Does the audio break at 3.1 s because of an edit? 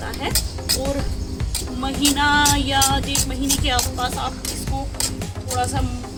no; 0 cuts

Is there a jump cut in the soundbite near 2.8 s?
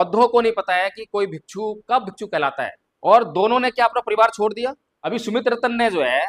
yes; 2 cuts; at 2.8 s, 4.9 s

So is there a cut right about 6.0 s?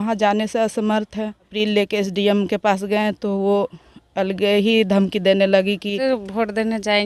yes; 2 cuts; at 1.5 s, 6.0 s

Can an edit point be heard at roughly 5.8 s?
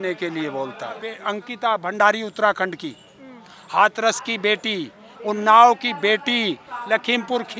no; 1 cut; at 1.3 s

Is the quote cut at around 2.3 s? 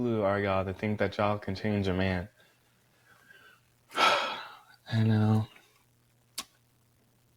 no; 0 cuts

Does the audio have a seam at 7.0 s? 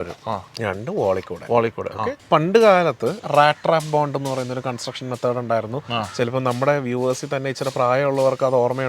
no; 2 cuts; at 2.2 s, 3.2 s

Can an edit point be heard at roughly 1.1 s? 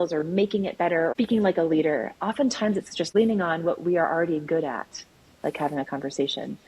yes; 2 cuts; at 1.1 s, 3.1 s

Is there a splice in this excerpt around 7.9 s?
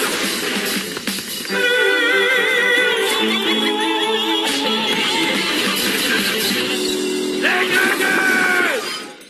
yes; 1 cut; at 7.9 s

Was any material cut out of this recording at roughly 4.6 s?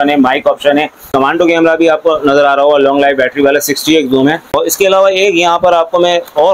yes; 2 cuts; at 1.1 s, 4.6 s

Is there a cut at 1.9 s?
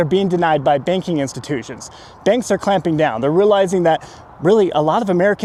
no; 0 cuts

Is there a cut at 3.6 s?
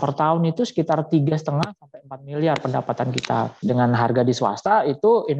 yes; 1 cut; at 3.6 s

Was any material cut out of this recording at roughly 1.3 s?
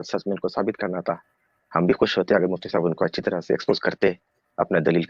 no; 0 cuts

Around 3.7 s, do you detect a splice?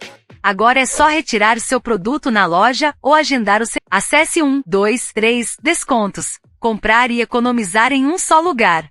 yes; 1 cut; at 3.7 s

